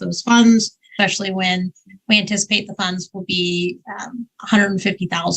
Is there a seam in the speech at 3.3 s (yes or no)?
no